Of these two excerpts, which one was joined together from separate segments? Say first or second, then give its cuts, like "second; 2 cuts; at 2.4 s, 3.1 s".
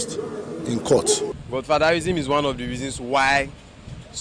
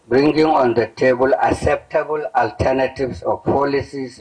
first; 1 cut; at 1.4 s